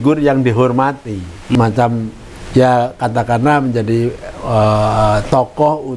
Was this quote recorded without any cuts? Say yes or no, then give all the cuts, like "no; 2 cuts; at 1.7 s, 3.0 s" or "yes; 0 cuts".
no; 1 cut; at 1.6 s